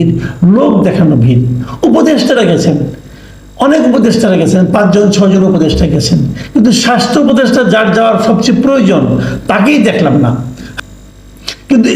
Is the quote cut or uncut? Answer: cut